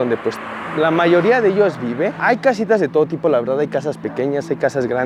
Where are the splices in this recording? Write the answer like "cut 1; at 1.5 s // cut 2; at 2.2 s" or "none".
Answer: none